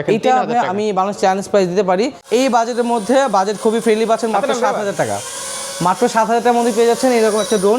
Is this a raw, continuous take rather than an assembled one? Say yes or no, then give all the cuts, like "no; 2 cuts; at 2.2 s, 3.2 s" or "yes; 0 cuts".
no; 1 cut; at 2.2 s